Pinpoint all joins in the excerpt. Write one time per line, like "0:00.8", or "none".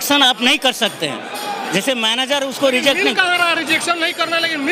none